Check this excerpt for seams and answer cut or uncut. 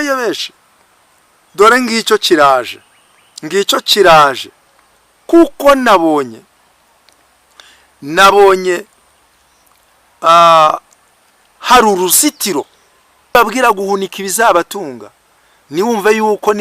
cut